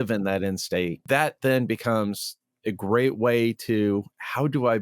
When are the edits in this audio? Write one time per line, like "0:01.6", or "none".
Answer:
0:01.0